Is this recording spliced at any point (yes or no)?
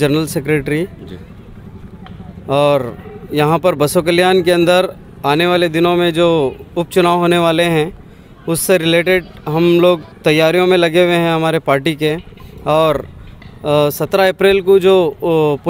no